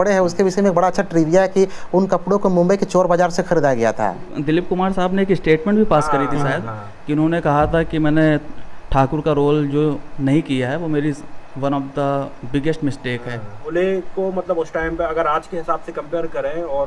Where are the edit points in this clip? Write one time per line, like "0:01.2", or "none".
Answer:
0:04.3
0:13.7